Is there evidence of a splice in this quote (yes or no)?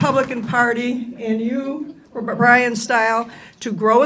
no